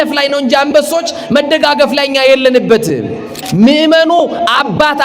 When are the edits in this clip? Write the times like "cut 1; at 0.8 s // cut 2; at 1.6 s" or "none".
cut 1; at 3.4 s

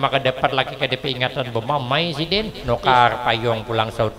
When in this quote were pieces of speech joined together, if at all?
cut 1; at 2.6 s

